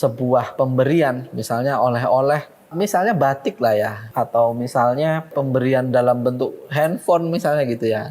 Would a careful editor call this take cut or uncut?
cut